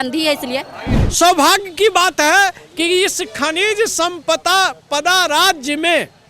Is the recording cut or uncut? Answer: cut